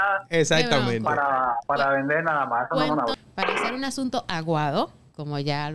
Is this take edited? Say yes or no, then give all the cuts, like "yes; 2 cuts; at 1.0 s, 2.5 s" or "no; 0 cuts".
yes; 2 cuts; at 1.6 s, 3.1 s